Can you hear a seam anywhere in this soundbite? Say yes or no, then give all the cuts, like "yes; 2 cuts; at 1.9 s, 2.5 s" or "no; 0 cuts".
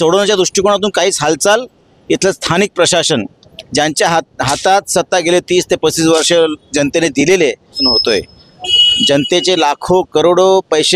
yes; 1 cut; at 7.8 s